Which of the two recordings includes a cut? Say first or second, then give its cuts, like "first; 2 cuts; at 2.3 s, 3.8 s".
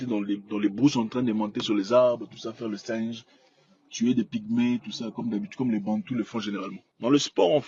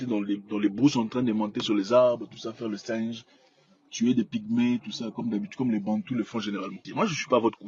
second; 1 cut; at 6.8 s